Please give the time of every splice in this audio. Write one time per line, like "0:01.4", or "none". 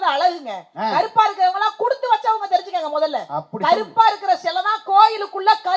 none

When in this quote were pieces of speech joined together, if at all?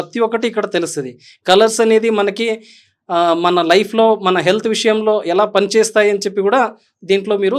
none

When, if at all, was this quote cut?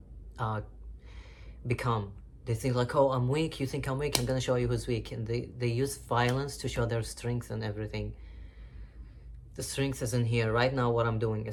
none

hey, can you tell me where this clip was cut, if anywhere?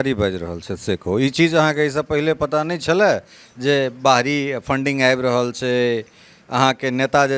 none

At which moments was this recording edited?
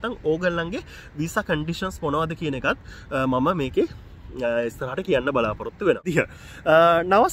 0:06.1

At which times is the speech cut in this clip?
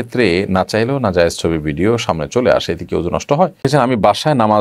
0:03.6

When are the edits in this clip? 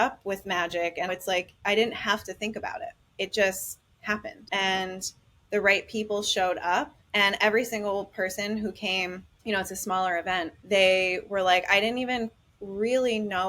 0:01.1
0:03.0
0:04.3
0:07.0
0:09.3
0:10.6

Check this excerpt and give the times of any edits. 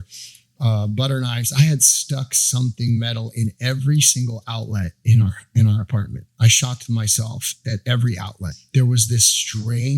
0:06.3
0:07.5
0:08.4

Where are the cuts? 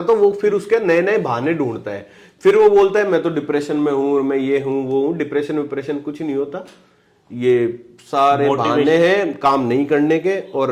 none

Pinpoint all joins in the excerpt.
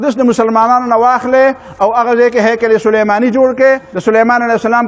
0:03.9

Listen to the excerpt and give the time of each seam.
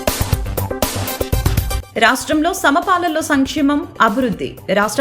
0:01.8

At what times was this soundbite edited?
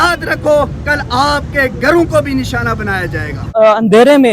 0:03.4

